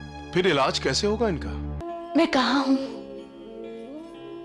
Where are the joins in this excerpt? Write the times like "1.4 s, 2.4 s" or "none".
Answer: 1.8 s